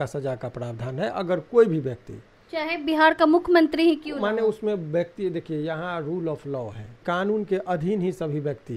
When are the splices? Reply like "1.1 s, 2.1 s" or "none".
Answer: 6.9 s